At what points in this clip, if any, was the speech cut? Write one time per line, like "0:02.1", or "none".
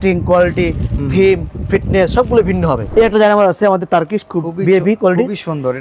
0:02.8